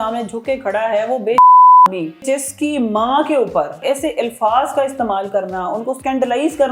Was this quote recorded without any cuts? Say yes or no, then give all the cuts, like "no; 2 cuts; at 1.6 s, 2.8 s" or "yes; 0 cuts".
no; 3 cuts; at 2.2 s, 3.8 s, 6.0 s